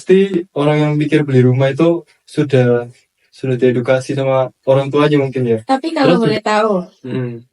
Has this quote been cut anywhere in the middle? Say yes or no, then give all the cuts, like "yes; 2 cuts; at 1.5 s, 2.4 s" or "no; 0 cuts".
yes; 1 cut; at 6.2 s